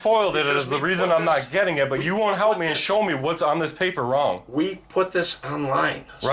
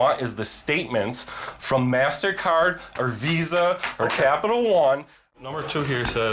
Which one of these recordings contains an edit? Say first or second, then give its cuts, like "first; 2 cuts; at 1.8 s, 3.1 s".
second; 1 cut; at 5.3 s